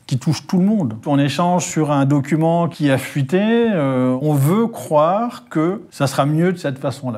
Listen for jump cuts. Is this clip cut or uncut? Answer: cut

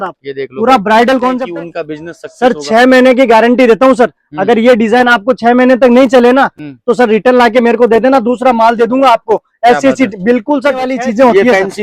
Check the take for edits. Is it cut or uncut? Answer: cut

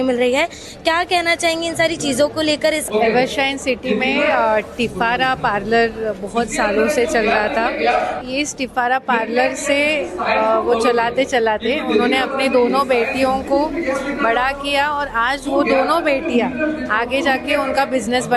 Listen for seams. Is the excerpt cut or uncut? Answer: cut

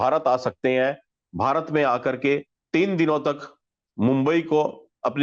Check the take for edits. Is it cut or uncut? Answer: uncut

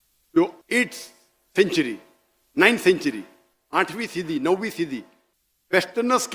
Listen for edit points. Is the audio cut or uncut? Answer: uncut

